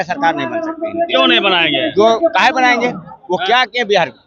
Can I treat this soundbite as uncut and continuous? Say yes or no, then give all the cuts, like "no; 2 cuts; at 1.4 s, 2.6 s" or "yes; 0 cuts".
yes; 0 cuts